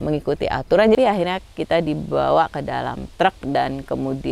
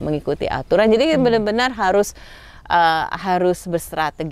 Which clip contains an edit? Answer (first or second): first